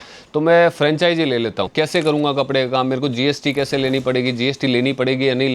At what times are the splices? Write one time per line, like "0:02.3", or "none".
0:01.7